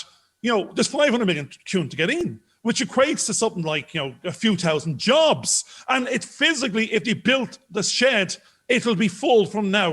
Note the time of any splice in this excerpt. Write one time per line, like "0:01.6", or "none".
none